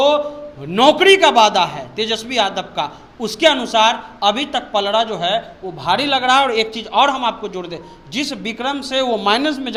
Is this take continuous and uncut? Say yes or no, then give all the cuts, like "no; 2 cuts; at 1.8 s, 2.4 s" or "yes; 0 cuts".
yes; 0 cuts